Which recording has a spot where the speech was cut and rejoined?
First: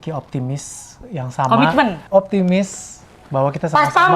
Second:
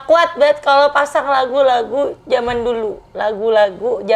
first; 1 cut; at 2.0 s

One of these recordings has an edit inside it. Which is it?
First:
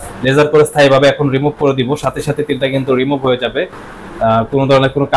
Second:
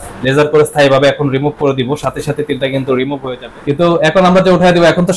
second; 1 cut; at 3.3 s

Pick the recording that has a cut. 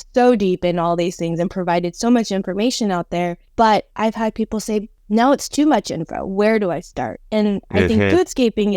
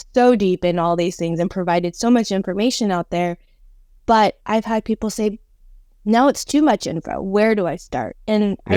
first; 2 cuts; at 3.4 s, 5.0 s

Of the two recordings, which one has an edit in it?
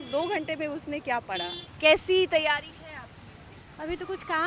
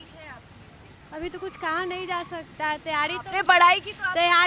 first; 1 cut; at 1.6 s

